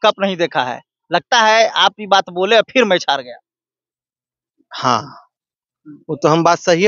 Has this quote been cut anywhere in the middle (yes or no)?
no